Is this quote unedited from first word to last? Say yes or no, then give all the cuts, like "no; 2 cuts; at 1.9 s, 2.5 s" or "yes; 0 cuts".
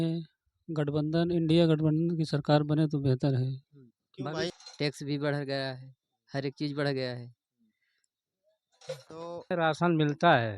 no; 2 cuts; at 4.6 s, 9.5 s